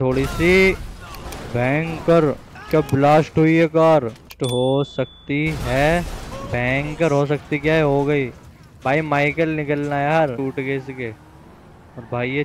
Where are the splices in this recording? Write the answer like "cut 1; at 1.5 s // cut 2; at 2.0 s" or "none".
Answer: cut 1; at 4.3 s // cut 2; at 10.4 s